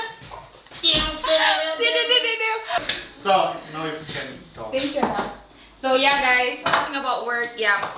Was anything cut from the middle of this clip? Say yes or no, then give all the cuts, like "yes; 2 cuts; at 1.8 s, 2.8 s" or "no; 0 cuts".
yes; 1 cut; at 2.9 s